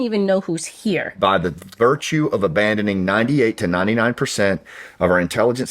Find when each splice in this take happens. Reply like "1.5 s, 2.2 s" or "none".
1.1 s